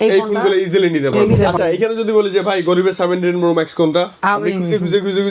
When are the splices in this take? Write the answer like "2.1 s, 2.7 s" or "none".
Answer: 1.3 s